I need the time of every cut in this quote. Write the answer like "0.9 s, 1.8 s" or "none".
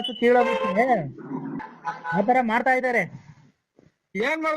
1.6 s